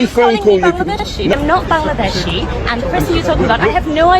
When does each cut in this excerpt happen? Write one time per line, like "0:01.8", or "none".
0:01.3